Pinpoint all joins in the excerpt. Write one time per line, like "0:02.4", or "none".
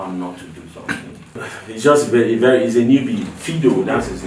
0:01.4